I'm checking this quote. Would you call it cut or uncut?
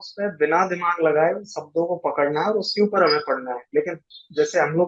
uncut